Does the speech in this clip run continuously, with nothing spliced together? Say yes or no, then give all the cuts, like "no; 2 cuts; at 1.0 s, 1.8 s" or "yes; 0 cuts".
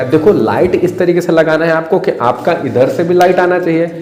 yes; 0 cuts